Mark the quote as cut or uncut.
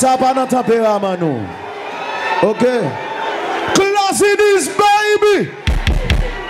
cut